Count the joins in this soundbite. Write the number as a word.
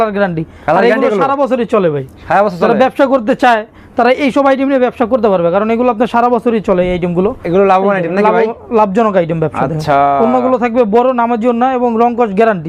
zero